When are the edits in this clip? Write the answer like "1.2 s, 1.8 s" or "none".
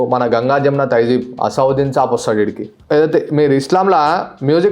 2.8 s